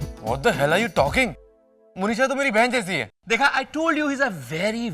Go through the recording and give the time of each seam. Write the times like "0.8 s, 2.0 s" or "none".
3.1 s